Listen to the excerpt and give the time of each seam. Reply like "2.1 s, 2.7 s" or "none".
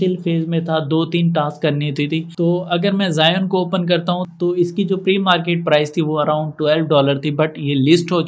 2.3 s